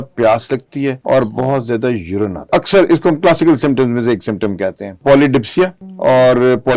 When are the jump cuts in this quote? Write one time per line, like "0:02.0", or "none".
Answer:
0:01.0
0:02.5
0:05.0
0:05.8